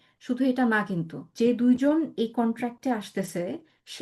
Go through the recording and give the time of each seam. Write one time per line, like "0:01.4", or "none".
0:01.2